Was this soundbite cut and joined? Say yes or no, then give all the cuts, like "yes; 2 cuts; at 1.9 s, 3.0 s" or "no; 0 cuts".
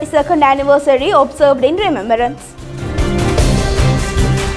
yes; 1 cut; at 2.8 s